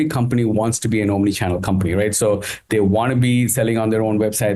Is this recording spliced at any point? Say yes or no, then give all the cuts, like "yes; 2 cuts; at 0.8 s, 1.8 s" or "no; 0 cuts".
no; 0 cuts